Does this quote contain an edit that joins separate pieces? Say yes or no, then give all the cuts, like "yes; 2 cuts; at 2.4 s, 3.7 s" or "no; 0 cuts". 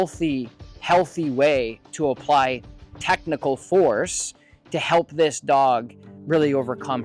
no; 0 cuts